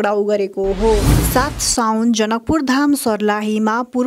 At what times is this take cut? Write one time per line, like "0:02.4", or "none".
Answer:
0:01.1